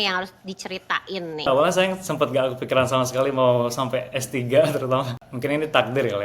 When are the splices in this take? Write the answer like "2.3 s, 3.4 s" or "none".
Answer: 1.5 s, 5.3 s